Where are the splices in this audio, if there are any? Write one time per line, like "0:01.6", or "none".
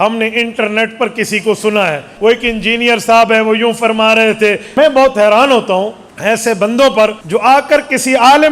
0:02.1
0:04.6
0:06.0
0:07.2

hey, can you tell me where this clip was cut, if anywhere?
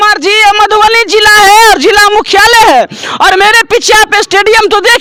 none

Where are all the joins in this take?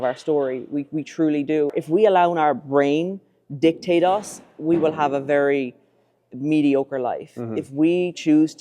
0:01.7

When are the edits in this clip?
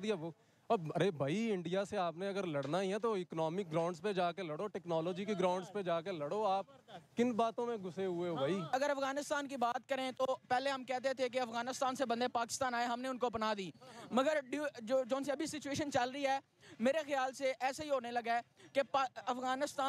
0:08.7

